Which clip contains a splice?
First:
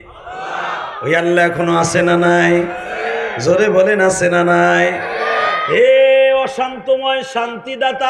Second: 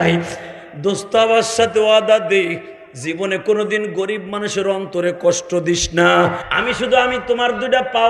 second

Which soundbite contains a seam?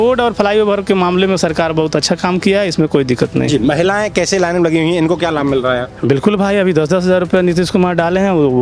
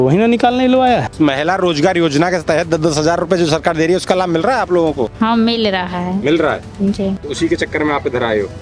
second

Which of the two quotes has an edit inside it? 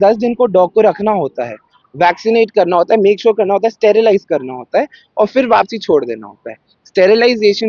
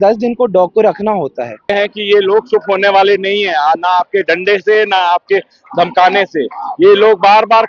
second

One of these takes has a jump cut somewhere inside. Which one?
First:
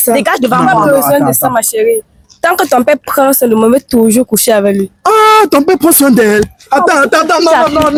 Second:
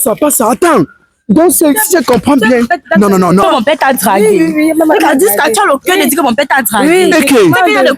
second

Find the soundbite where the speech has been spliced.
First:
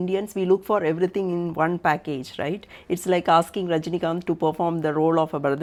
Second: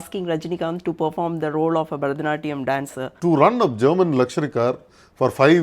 second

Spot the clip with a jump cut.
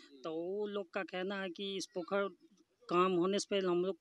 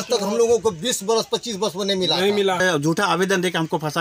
second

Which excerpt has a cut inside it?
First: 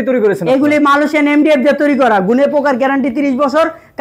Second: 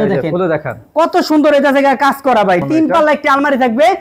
second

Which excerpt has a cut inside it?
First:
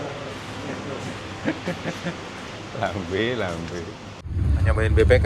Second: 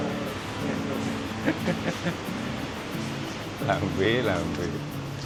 first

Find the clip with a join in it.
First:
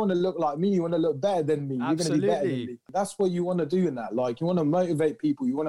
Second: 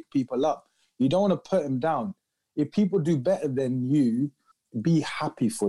first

